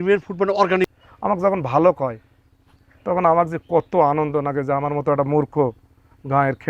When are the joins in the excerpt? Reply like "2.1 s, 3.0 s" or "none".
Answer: 1.0 s